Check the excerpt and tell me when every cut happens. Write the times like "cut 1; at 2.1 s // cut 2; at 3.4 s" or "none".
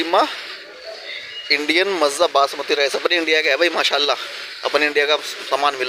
none